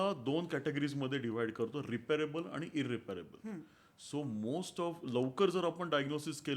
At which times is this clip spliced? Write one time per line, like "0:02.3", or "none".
none